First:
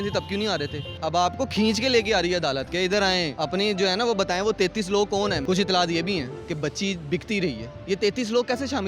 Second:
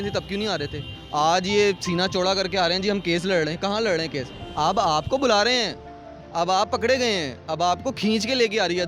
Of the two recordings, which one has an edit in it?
first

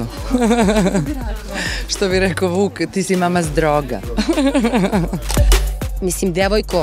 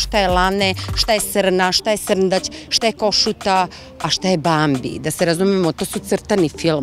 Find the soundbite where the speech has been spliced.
first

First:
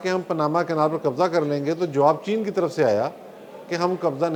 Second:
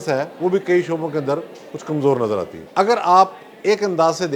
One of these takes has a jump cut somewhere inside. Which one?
second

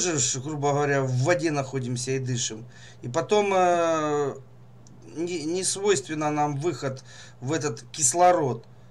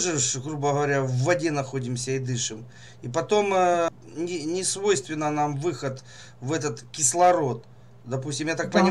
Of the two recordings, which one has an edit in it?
second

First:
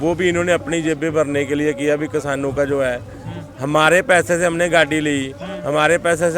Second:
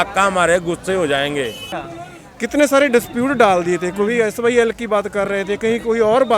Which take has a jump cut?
second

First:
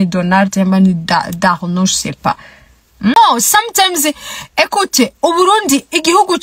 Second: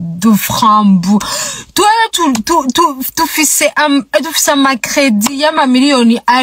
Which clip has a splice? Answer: first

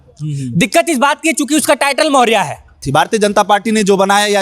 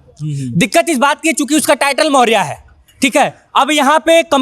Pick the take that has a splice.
first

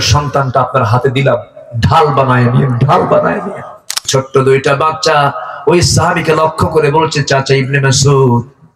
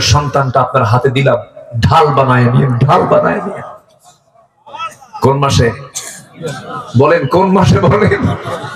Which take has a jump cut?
first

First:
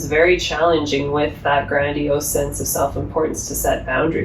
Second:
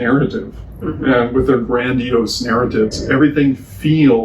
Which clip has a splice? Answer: second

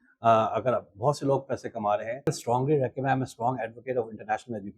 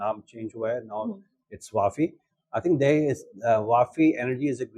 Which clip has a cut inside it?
first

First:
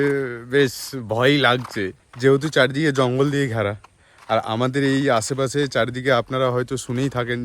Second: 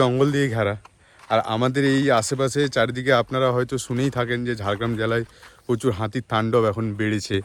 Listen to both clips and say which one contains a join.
first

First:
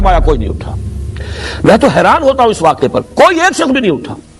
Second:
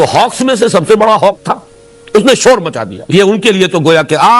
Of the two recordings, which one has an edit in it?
second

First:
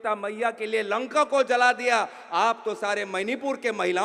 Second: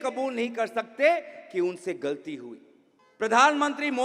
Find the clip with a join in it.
second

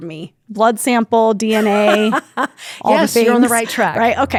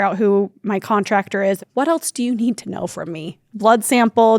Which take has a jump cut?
second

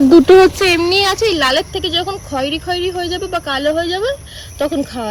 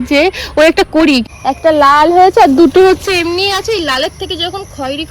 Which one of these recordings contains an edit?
second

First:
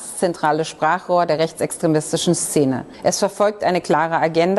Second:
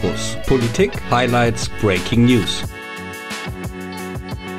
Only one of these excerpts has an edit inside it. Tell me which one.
first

